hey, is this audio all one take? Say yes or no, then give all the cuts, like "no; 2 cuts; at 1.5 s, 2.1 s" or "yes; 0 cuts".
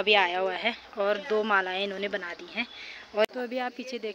no; 1 cut; at 3.2 s